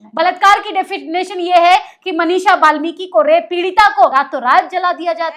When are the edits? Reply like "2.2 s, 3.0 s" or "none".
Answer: 4.1 s